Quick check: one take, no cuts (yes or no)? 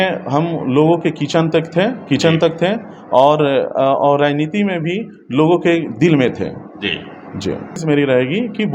no